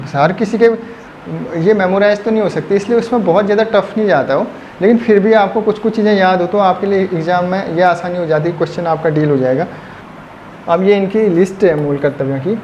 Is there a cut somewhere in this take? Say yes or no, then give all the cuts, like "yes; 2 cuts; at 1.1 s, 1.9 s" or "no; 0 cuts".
no; 0 cuts